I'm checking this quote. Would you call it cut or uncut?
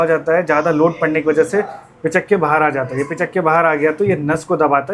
uncut